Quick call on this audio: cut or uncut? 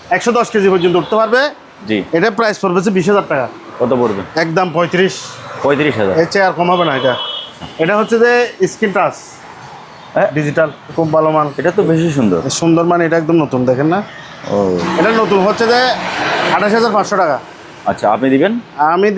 cut